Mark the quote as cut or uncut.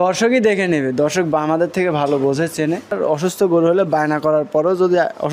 cut